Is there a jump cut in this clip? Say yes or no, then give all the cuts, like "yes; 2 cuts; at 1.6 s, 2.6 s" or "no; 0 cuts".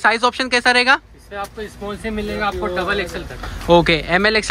no; 0 cuts